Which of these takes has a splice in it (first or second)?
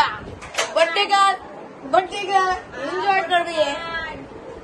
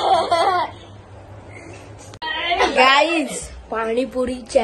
second